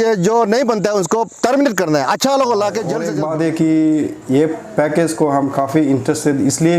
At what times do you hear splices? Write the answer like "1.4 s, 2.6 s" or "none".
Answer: 3.1 s